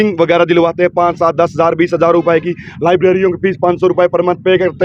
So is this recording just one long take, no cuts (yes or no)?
yes